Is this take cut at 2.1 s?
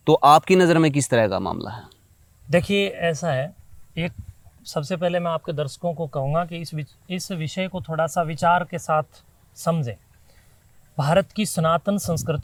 no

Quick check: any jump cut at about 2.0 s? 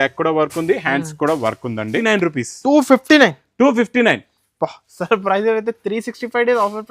yes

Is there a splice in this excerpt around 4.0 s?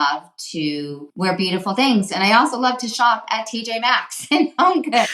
no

